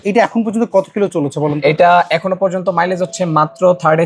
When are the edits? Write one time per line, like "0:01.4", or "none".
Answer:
none